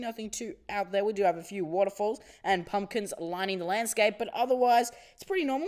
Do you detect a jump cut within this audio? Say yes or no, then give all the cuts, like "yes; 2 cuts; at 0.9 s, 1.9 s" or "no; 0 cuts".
yes; 1 cut; at 4.7 s